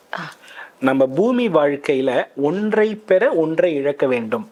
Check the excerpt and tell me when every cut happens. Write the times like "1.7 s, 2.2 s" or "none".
none